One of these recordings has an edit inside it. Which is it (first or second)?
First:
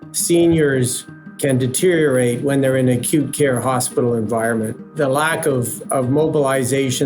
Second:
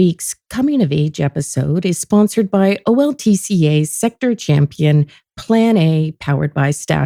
first